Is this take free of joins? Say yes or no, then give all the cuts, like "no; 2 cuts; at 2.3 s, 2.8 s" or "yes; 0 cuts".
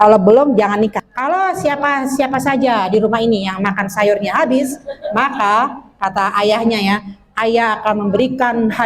no; 1 cut; at 1.0 s